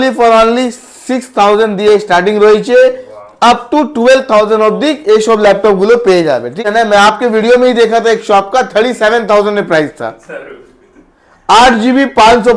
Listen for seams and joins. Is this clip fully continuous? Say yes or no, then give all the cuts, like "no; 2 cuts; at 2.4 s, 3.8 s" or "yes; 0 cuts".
no; 1 cut; at 6.6 s